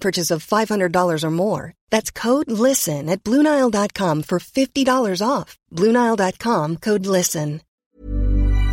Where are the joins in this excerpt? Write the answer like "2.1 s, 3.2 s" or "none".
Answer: 7.7 s